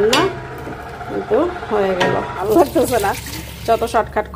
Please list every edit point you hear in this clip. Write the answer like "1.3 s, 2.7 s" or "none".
2.4 s